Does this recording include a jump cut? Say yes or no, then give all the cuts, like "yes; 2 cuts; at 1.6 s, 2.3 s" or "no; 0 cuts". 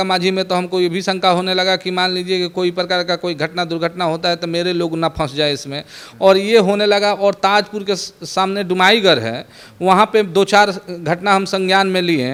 no; 0 cuts